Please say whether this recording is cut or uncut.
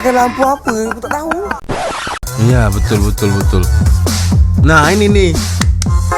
cut